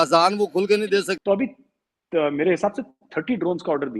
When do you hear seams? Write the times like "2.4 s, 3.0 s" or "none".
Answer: 1.1 s

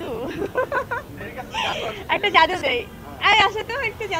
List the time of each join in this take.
none

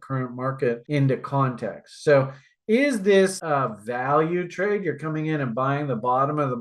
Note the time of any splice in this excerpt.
3.4 s

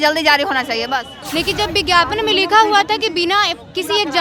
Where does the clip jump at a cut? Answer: 1.2 s

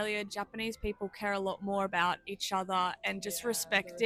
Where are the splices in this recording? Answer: none

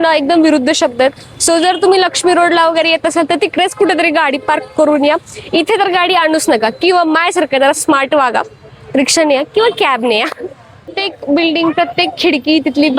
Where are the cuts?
10.9 s

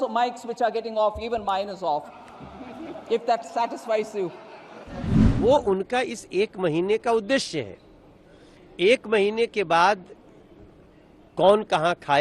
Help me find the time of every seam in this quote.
5.0 s

